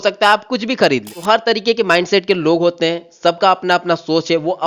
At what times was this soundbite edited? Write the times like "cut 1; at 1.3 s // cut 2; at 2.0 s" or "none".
cut 1; at 1.1 s